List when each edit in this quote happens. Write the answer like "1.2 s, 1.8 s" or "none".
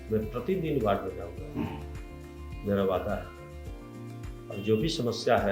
none